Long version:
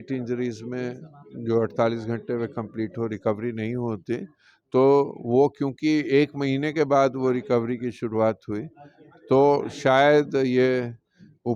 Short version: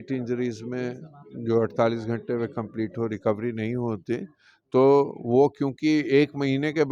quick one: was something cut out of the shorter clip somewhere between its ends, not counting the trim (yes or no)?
no